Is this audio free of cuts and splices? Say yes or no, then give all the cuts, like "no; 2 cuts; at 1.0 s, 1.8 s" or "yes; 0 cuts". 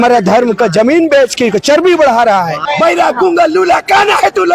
no; 1 cut; at 2.6 s